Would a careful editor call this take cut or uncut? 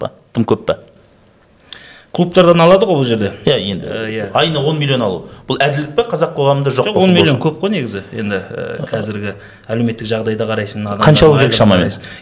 uncut